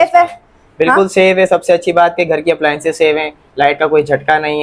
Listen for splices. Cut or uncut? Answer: uncut